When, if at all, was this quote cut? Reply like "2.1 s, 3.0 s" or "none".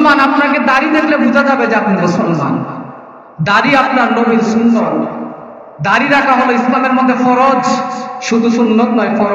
none